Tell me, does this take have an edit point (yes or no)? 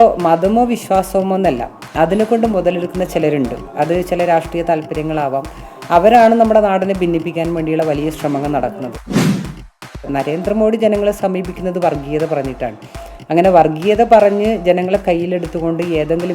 yes